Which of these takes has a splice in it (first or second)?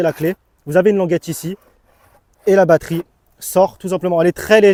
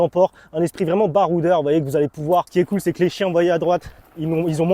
second